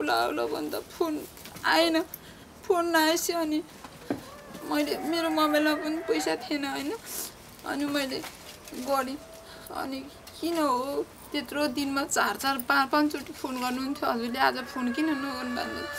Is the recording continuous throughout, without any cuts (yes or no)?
yes